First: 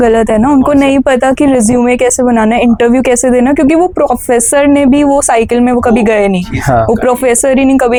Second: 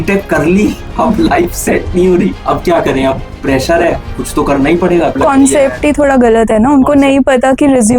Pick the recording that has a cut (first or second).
second